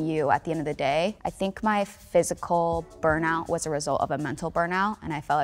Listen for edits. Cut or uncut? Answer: cut